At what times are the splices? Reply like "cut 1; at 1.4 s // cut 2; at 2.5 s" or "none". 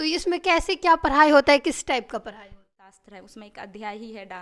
cut 1; at 3.0 s